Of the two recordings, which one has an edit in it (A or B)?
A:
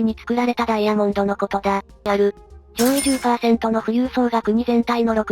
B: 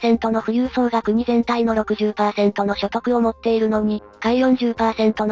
A